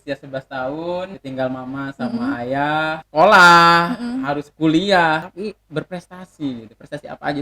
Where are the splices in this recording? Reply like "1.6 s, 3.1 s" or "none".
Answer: 1.2 s, 3.0 s, 5.3 s